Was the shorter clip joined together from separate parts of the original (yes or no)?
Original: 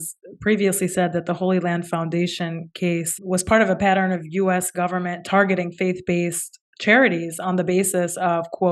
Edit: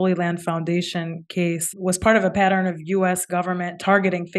no